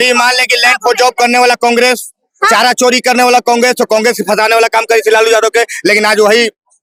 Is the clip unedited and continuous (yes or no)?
yes